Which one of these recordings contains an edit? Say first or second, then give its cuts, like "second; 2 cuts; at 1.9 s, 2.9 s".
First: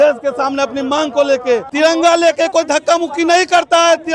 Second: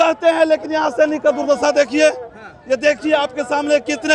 first; 1 cut; at 1.7 s